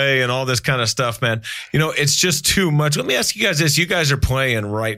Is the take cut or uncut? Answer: uncut